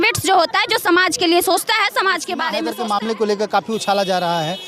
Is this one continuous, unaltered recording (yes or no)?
no